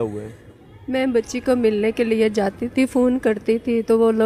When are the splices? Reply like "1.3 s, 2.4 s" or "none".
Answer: none